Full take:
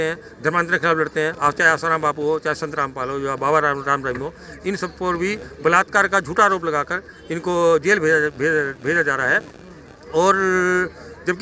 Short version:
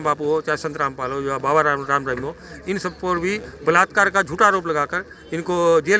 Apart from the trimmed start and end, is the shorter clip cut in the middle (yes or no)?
no